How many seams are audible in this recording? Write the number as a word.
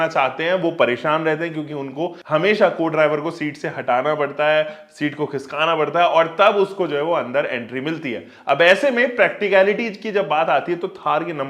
one